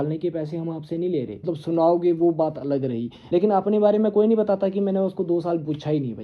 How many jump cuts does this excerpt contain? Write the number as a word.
two